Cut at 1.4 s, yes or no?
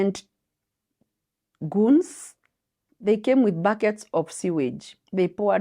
no